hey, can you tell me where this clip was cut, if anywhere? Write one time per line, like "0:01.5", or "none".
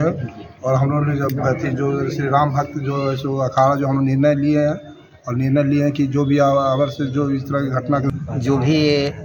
0:08.1